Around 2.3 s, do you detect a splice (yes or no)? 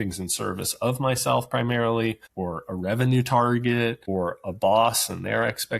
yes